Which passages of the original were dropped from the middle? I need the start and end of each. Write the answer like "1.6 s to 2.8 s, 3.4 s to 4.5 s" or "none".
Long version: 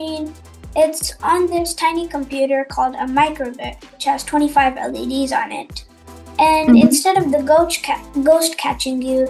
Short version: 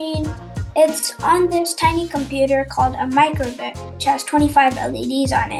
none

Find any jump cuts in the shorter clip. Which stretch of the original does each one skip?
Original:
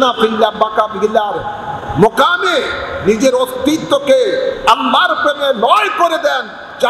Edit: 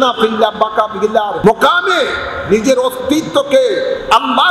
1.4 s to 2.0 s

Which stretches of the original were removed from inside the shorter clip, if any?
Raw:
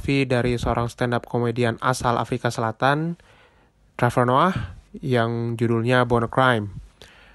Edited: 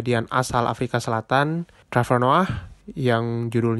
3.3 s to 3.8 s

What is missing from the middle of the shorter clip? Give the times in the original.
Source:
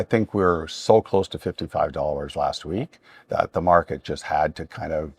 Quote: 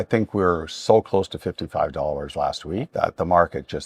2.9 s to 3.2 s

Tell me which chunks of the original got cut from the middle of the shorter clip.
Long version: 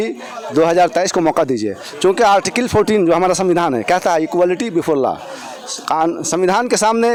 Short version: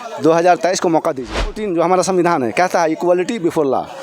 1.9 s to 2.9 s

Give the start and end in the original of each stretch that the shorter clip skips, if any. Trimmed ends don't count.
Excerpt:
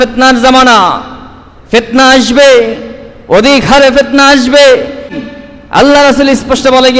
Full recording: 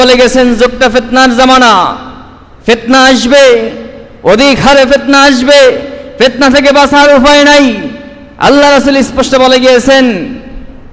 6.1 s to 7.8 s

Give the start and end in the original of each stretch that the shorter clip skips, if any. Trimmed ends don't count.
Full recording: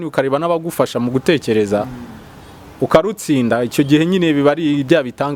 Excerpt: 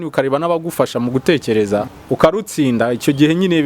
1.9 s to 2.7 s

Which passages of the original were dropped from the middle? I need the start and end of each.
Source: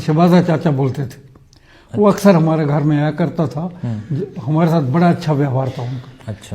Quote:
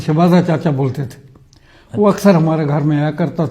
none

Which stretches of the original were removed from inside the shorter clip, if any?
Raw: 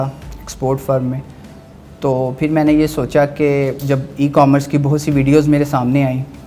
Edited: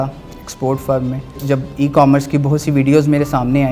1.4 s to 3.8 s

